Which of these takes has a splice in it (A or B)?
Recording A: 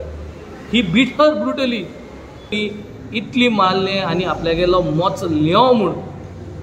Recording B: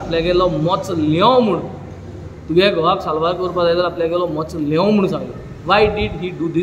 A